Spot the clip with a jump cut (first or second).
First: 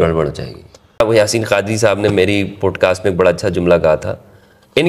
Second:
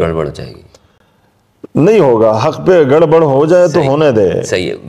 first